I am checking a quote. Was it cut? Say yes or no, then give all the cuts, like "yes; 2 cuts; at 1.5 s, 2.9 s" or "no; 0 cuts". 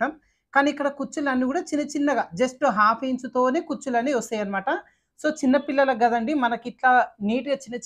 no; 0 cuts